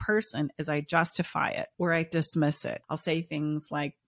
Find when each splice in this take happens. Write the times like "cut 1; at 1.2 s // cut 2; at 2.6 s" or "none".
cut 1; at 1.7 s // cut 2; at 2.8 s

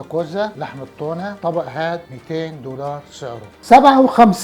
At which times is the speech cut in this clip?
cut 1; at 3.5 s

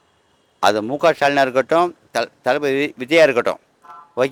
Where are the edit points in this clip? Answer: none

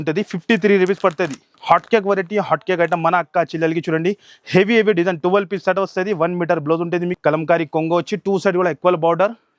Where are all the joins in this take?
cut 1; at 1.5 s // cut 2; at 7.2 s

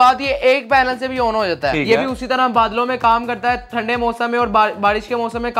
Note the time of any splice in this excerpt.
cut 1; at 1.8 s

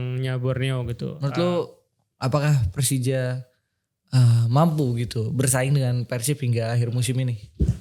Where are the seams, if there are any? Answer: cut 1; at 1.2 s

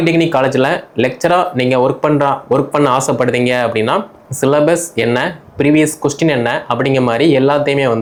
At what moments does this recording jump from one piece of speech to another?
none

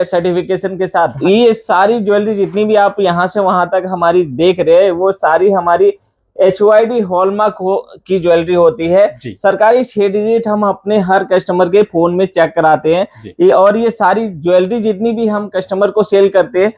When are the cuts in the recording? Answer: cut 1; at 1.1 s

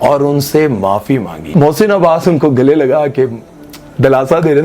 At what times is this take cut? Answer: cut 1; at 1.5 s

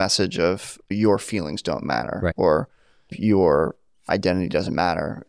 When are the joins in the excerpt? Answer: none

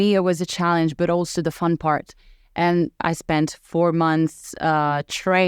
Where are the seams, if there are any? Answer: cut 1; at 3.0 s

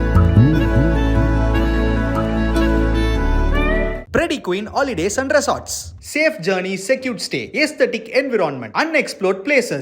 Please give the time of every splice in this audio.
cut 1; at 4.0 s

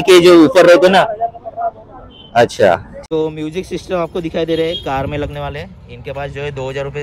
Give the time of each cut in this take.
cut 1; at 2.9 s

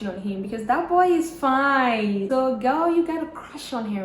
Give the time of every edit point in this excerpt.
cut 1; at 2.3 s

